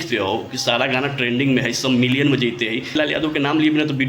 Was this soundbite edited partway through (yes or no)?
yes